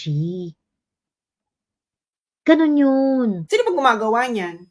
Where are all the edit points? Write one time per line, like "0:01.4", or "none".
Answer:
0:03.4